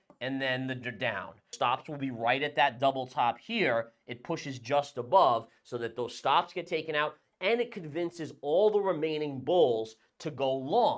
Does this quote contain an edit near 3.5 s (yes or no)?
no